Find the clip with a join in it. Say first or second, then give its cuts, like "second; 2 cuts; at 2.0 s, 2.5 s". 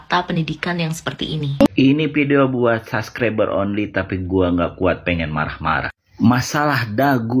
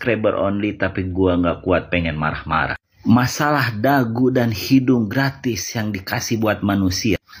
first; 1 cut; at 1.7 s